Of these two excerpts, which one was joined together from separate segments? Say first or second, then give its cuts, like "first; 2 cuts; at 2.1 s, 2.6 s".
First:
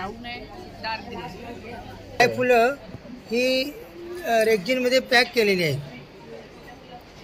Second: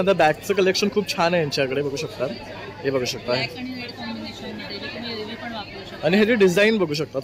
first; 1 cut; at 2.2 s